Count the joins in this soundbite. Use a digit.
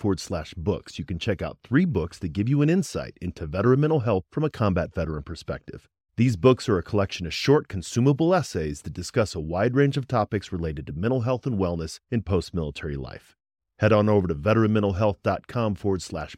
0